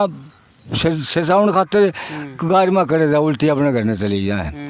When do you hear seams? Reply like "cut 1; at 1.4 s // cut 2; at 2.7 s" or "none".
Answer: none

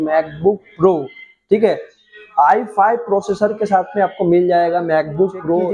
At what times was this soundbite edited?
none

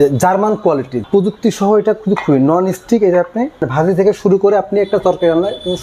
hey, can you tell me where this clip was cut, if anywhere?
cut 1; at 1.0 s // cut 2; at 3.6 s

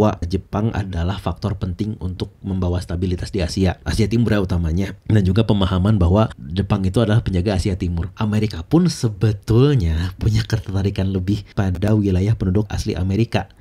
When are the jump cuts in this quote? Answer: cut 1; at 8.1 s

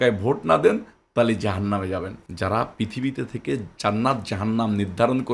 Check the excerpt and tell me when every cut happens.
cut 1; at 2.2 s

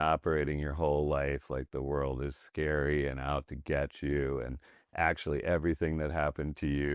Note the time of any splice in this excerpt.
none

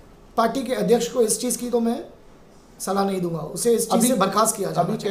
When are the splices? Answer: none

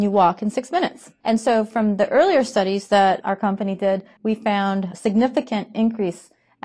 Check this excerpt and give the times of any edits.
cut 1; at 1.1 s // cut 2; at 4.1 s

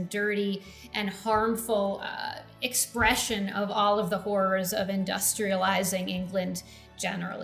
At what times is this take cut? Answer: none

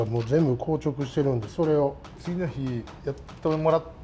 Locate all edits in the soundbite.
cut 1; at 2.2 s // cut 2; at 2.9 s

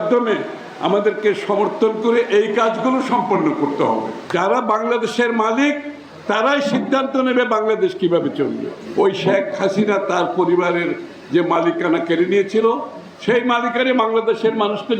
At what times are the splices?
cut 1; at 4.2 s // cut 2; at 8.8 s

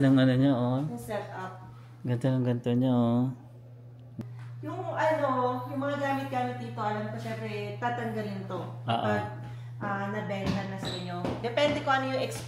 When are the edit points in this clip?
cut 1; at 4.1 s

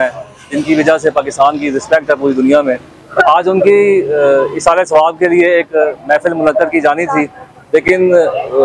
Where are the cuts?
none

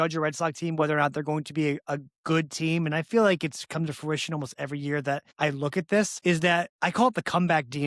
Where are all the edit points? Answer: cut 1; at 5.3 s // cut 2; at 6.4 s

